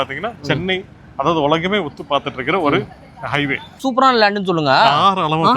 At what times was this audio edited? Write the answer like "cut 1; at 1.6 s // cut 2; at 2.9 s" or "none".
cut 1; at 3.8 s

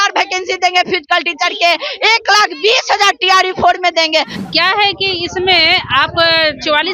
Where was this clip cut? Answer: cut 1; at 4.4 s

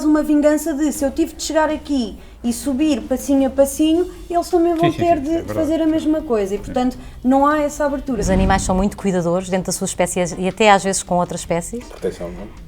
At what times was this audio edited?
cut 1; at 8.2 s

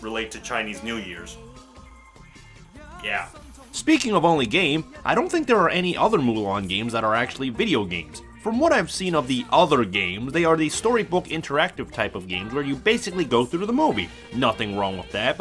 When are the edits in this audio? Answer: none

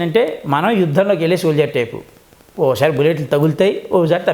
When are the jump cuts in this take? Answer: none

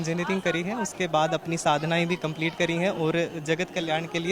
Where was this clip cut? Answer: none

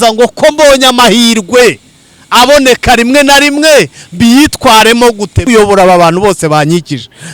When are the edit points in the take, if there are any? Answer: cut 1; at 5.4 s

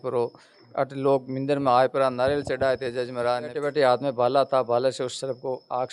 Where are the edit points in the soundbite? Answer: cut 1; at 3.6 s

